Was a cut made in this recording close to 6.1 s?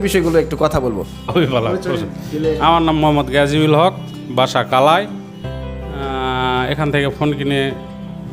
no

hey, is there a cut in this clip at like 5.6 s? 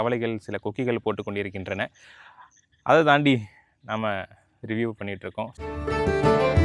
yes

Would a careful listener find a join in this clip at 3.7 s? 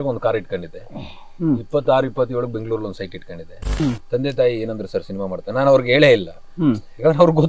yes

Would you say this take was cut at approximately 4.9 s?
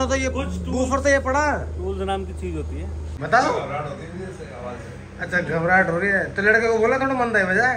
no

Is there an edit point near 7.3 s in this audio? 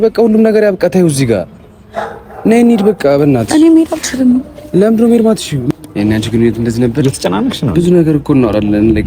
no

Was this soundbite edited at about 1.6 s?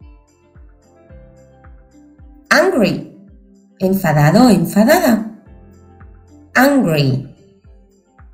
no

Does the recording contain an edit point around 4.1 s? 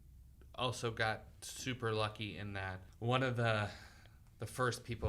no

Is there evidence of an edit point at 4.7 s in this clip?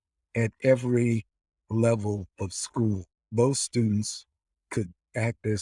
no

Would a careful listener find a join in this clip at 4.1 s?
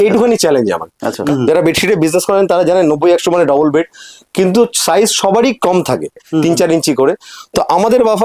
no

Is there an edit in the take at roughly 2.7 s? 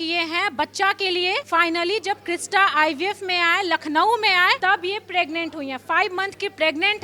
no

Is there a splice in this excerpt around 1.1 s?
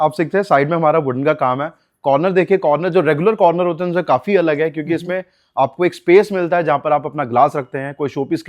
no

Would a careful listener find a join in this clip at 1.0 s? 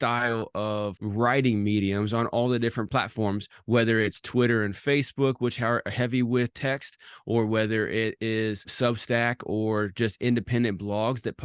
yes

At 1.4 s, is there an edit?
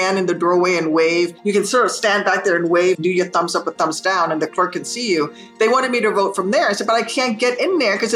yes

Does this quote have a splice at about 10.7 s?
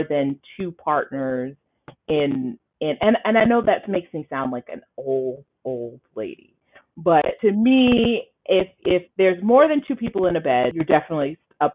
yes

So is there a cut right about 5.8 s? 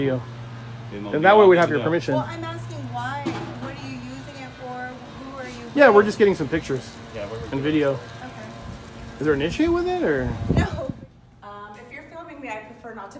no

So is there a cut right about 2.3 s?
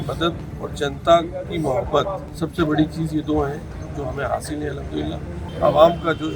yes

